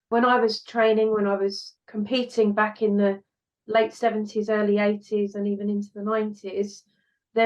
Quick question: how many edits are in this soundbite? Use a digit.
0